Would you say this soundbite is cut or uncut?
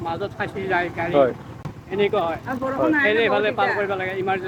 uncut